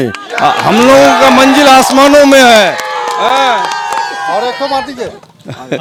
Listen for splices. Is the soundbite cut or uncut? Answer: uncut